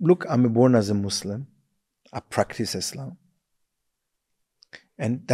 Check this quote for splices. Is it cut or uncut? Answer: uncut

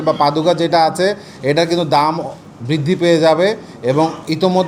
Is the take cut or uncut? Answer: uncut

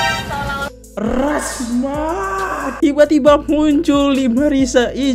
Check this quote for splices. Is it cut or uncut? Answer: uncut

